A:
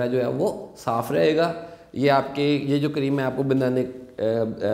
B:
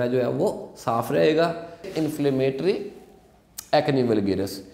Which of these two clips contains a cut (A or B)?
B